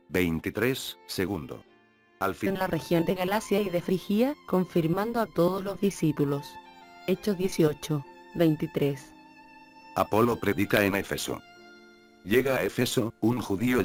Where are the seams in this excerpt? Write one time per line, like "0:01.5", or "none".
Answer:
none